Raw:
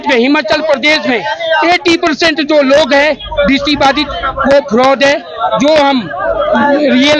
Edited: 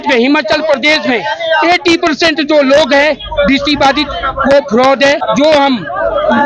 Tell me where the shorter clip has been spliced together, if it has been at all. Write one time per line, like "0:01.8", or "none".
0:05.2